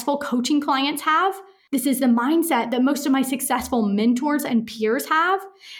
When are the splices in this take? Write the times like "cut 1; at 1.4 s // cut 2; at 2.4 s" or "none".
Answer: cut 1; at 1.5 s